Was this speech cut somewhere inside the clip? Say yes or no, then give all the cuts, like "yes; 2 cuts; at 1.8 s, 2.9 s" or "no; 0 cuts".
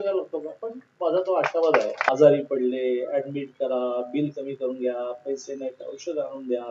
yes; 1 cut; at 2.1 s